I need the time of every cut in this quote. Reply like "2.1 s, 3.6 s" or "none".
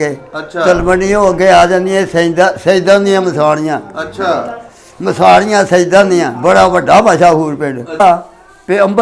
8.0 s